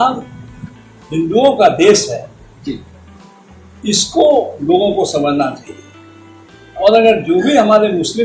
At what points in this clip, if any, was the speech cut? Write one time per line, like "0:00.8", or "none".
none